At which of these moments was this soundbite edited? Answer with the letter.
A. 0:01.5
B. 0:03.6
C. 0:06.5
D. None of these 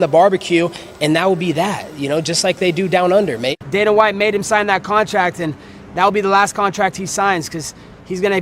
B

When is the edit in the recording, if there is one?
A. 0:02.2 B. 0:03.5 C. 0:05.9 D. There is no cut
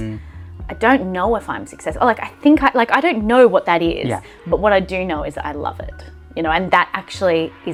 D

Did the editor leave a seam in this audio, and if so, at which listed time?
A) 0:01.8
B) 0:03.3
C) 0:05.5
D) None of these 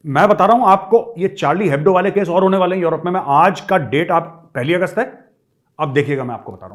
D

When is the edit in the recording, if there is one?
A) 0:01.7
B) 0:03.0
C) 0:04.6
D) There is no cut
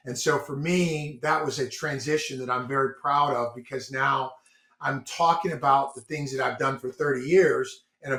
D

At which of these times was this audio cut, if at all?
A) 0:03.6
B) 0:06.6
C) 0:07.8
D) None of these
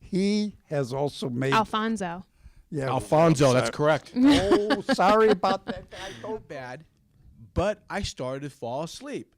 B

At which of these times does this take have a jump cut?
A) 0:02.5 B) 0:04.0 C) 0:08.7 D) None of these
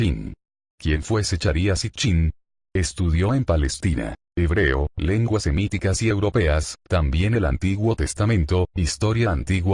B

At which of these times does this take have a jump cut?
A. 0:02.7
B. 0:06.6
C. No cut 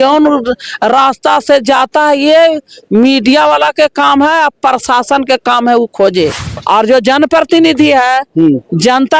B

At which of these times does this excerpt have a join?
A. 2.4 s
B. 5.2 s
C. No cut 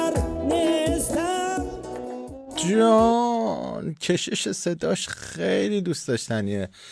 C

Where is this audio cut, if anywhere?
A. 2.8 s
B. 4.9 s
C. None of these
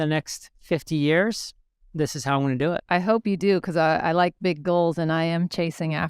A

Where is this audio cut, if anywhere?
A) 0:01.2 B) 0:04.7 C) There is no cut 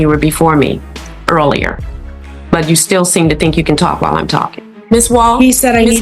B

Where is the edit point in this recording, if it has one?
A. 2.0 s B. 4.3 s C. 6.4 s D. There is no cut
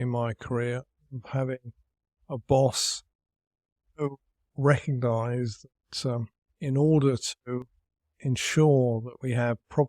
C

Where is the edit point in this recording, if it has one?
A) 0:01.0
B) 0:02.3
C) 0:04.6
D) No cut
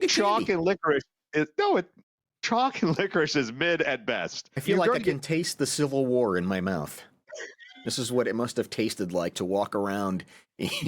C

